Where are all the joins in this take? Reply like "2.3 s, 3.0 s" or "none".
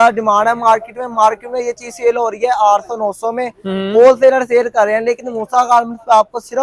none